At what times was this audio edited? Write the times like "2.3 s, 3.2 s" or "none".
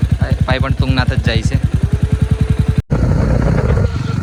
none